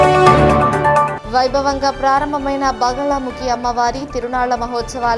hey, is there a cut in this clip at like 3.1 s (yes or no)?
no